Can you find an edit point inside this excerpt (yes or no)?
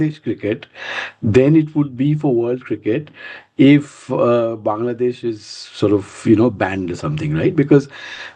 no